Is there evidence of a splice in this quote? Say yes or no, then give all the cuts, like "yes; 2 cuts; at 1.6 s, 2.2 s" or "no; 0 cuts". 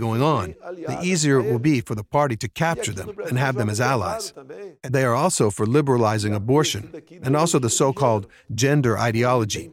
yes; 1 cut; at 4.7 s